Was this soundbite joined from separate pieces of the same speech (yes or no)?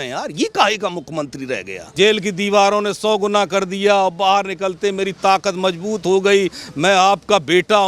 yes